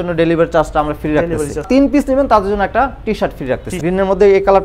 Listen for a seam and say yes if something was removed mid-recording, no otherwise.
yes